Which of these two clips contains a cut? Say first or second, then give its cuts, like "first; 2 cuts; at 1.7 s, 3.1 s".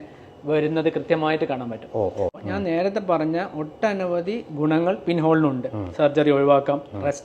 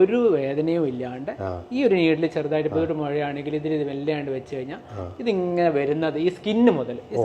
first; 1 cut; at 2.3 s